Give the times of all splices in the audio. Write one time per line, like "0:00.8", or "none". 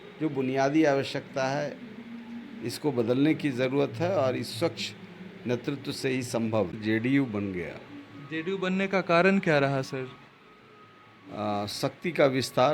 0:06.8